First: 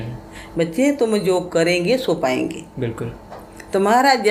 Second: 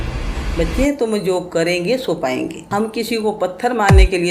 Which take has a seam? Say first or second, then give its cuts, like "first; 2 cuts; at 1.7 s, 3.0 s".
second; 1 cut; at 2.6 s